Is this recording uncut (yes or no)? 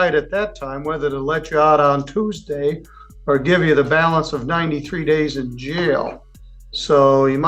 yes